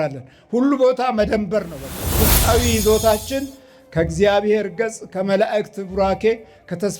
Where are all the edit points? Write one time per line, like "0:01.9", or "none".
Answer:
0:02.1